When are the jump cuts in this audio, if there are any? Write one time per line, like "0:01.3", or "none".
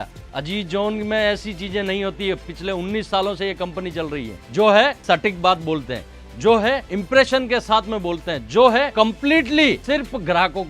0:04.4
0:05.0
0:06.9
0:08.9
0:09.8